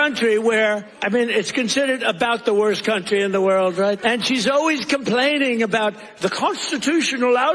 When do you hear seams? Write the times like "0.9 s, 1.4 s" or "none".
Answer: 0.9 s, 4.0 s